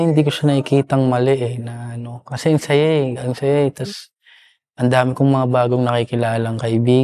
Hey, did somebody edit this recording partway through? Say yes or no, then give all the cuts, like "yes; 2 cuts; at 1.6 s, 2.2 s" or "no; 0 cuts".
no; 0 cuts